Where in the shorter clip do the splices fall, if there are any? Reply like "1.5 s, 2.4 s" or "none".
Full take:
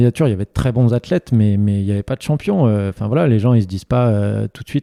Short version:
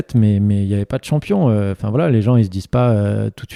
none